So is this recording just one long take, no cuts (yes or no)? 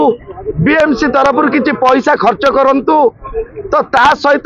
yes